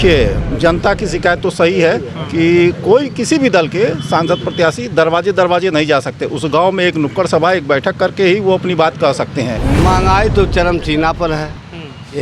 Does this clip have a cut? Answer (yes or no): yes